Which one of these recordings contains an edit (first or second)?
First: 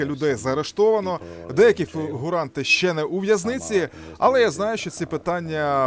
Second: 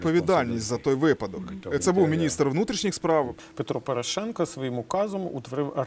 second